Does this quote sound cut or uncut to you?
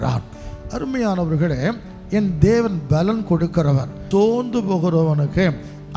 cut